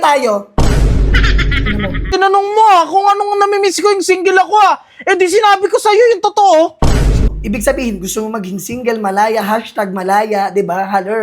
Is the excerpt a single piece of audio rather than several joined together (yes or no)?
no